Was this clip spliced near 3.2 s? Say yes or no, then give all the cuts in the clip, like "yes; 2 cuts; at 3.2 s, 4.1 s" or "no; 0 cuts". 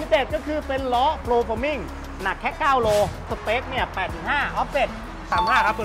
yes; 1 cut; at 3.2 s